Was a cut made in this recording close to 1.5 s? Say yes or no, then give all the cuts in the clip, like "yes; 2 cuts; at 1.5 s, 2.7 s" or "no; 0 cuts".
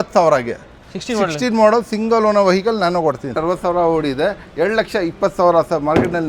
no; 1 cut; at 3.4 s